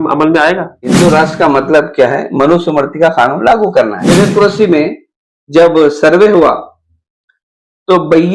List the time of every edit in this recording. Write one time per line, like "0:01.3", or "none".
0:00.9
0:04.0

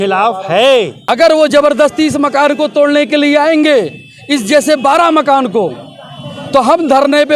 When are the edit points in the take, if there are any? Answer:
0:01.0

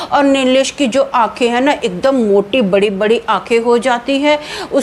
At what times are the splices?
none

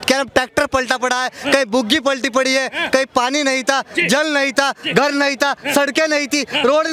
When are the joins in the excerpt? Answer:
none

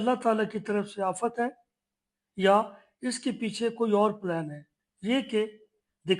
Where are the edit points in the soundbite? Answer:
none

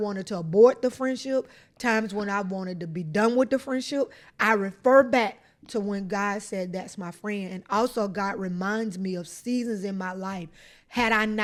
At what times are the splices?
none

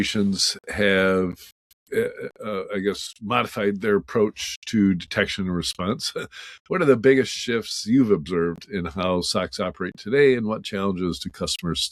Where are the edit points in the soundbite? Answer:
none

